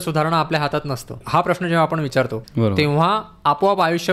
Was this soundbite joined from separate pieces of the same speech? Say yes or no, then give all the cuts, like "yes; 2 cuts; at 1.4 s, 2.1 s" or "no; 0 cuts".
yes; 2 cuts; at 1.2 s, 2.4 s